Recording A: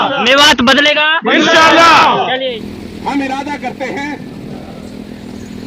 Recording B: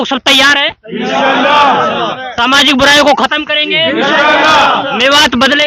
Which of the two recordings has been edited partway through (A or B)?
A